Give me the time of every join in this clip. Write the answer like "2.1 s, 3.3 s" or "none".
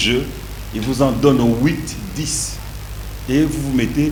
none